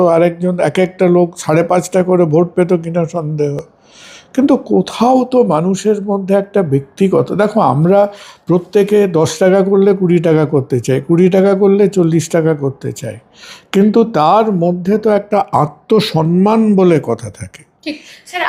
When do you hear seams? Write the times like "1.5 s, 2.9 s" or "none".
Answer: none